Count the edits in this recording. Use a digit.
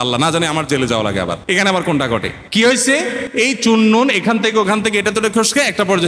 3